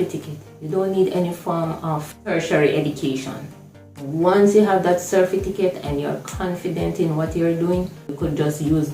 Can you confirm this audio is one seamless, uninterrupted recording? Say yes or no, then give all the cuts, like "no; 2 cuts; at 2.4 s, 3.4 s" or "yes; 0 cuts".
no; 2 cuts; at 2.1 s, 8.0 s